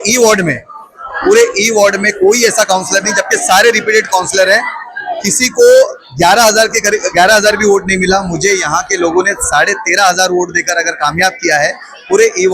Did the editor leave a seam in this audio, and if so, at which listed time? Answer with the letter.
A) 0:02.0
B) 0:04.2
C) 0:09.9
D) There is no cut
D